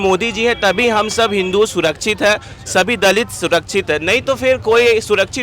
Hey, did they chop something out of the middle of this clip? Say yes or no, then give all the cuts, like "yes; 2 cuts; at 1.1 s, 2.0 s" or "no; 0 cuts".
no; 0 cuts